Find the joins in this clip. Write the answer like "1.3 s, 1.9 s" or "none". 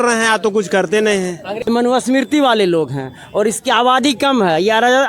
1.6 s